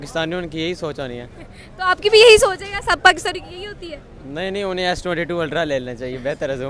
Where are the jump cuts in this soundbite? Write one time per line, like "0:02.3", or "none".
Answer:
none